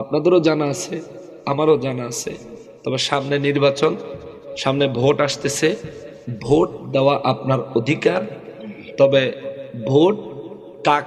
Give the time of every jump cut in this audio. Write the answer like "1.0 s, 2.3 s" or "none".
none